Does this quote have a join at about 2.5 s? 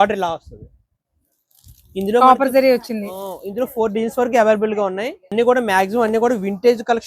no; 1 cut; at 5.3 s

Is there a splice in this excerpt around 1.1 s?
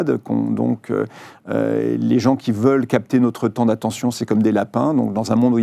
no; 0 cuts

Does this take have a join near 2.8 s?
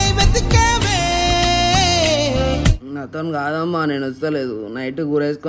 yes; 1 cut; at 2.8 s

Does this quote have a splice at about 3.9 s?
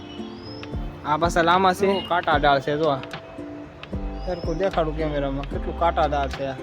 no; 1 cut; at 2.0 s

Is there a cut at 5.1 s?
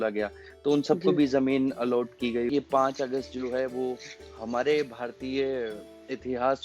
no; 1 cut; at 2.5 s

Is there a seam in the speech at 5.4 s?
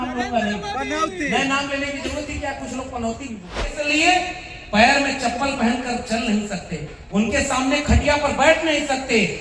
no; 1 cut; at 3.8 s

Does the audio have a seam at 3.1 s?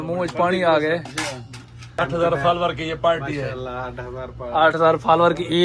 no; 1 cut; at 1.9 s

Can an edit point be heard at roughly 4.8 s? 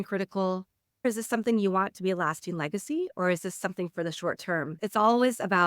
yes; 2 cuts; at 1.1 s, 4.8 s

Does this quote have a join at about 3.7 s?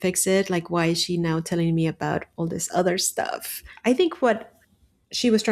yes; 1 cut; at 3.7 s

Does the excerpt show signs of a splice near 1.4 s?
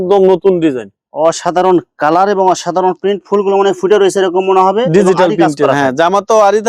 no; 0 cuts

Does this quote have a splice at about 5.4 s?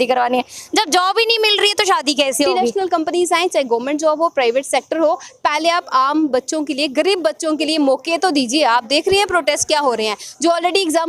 no; 1 cut; at 2.6 s

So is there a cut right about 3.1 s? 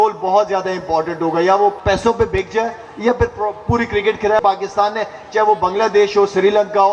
no; 2 cuts; at 1.8 s, 4.4 s

